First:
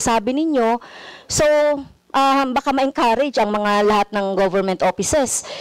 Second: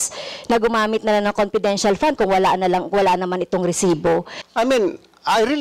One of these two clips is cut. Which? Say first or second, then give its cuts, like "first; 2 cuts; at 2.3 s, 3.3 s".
second; 1 cut; at 4.4 s